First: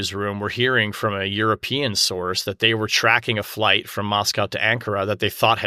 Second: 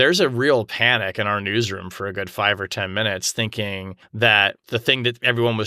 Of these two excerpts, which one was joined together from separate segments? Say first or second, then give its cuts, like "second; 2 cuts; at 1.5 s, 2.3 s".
second; 2 cuts; at 4.0 s, 4.6 s